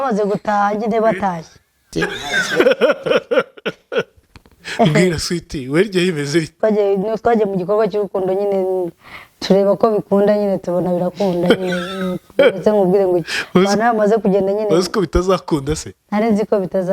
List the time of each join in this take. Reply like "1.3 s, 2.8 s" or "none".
1.9 s, 4.6 s